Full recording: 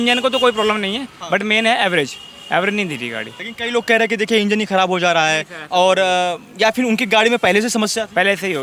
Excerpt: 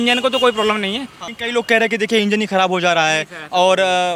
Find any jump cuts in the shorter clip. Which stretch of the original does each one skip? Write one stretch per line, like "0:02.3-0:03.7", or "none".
0:01.1-0:03.3